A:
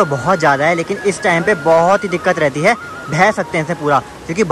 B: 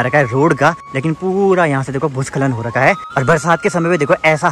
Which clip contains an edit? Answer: B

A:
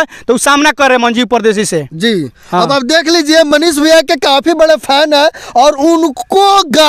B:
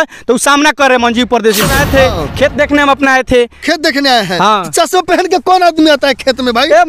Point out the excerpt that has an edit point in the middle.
B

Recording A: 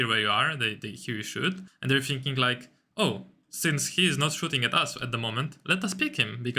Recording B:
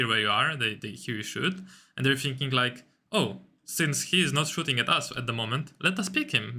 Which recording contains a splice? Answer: A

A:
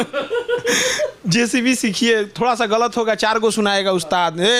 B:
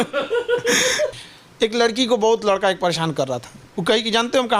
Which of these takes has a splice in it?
B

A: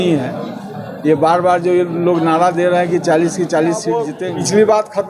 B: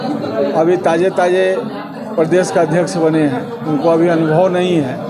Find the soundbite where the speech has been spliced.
A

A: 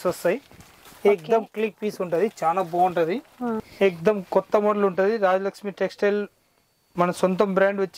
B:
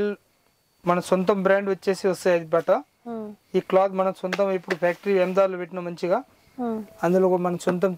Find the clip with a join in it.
A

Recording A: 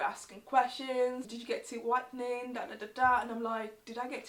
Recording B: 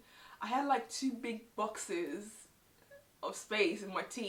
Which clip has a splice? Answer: A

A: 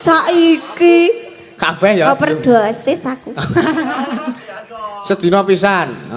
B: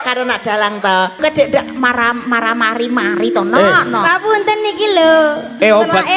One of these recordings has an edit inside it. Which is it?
B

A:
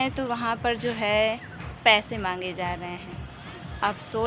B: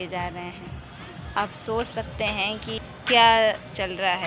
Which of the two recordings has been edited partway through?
B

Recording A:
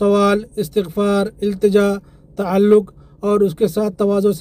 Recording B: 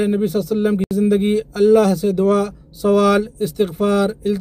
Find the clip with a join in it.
B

